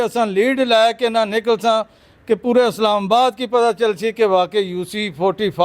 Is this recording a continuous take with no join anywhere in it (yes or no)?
yes